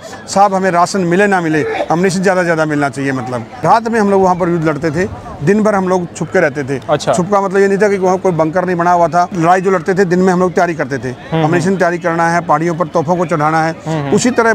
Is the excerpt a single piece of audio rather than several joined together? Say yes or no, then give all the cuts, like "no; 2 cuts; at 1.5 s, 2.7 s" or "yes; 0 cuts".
yes; 0 cuts